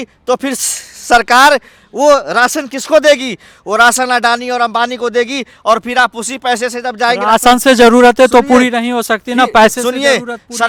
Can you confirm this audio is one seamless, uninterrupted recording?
yes; 0 cuts

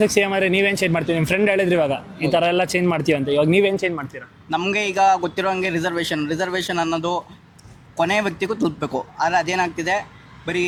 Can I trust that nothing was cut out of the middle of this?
yes; 0 cuts

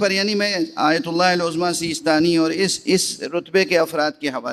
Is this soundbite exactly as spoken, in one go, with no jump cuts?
yes; 0 cuts

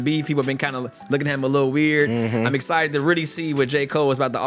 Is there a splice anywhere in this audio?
no; 0 cuts

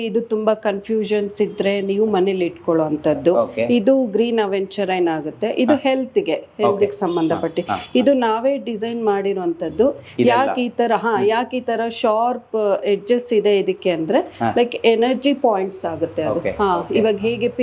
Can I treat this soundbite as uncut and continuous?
yes; 0 cuts

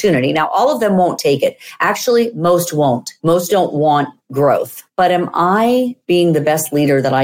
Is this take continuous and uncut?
yes; 0 cuts

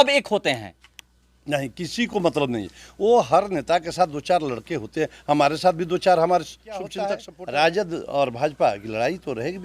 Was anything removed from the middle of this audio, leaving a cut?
yes; 1 cut; at 7.0 s

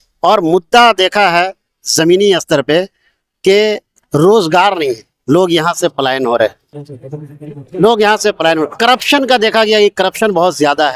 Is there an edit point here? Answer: no; 0 cuts

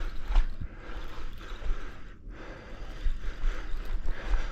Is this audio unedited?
yes; 0 cuts

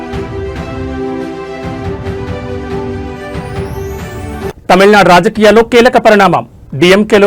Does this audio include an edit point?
no; 0 cuts

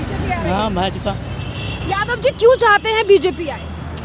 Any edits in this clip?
no; 0 cuts

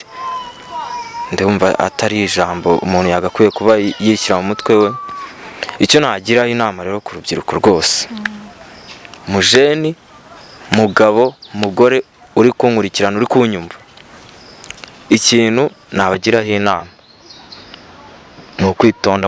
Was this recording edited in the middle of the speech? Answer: no; 0 cuts

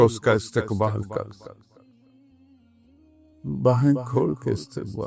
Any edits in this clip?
yes; 2 cuts; at 1.5 s, 3.4 s

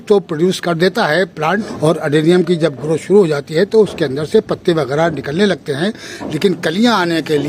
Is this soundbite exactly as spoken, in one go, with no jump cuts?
no; 1 cut; at 1.7 s

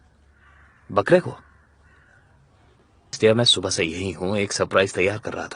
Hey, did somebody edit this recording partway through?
yes; 1 cut; at 3.2 s

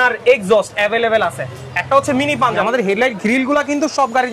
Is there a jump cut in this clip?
yes; 1 cut; at 2.6 s

